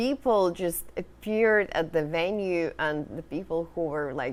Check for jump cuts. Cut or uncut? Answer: uncut